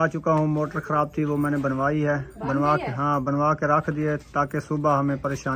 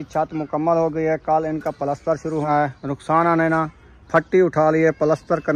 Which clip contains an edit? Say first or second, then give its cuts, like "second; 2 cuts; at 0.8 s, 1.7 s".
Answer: second; 1 cut; at 2.4 s